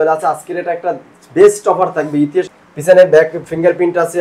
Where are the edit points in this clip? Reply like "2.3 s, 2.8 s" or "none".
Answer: 2.6 s